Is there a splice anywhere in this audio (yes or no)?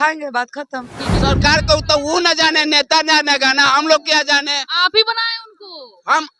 yes